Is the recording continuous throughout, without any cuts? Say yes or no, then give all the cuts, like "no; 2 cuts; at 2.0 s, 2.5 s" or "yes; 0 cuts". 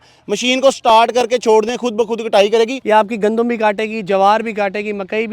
no; 1 cut; at 2.8 s